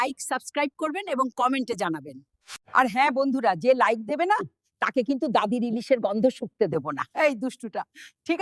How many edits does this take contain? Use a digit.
1